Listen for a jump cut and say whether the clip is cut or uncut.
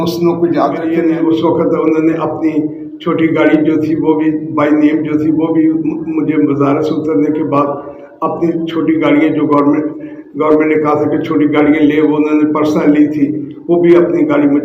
cut